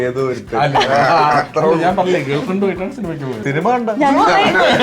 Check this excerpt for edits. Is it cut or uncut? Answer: cut